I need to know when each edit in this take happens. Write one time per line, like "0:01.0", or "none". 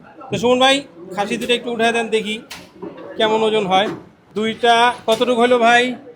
none